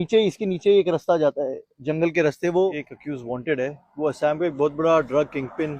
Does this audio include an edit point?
yes; 1 cut; at 2.9 s

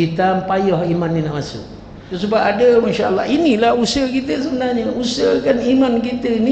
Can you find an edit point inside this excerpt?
yes; 1 cut; at 2.1 s

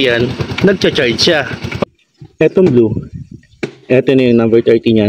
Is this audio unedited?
no; 1 cut; at 1.8 s

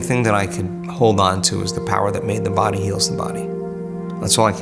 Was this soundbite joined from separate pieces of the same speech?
yes; 1 cut; at 3.7 s

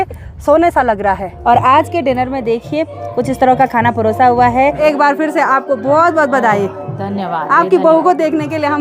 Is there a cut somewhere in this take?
yes; 2 cuts; at 1.3 s, 4.8 s

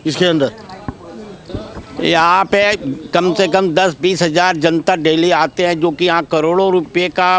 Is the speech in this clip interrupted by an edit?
yes; 1 cut; at 1.5 s

